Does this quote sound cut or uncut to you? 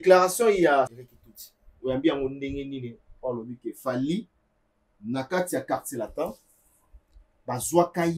cut